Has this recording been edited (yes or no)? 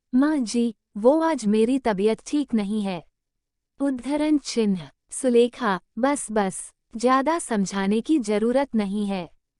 no